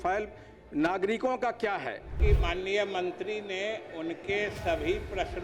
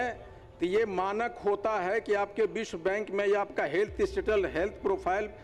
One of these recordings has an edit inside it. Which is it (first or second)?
first